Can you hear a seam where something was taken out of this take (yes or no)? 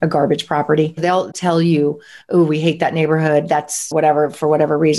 yes